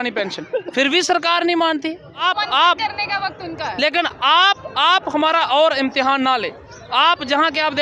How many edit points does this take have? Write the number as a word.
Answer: one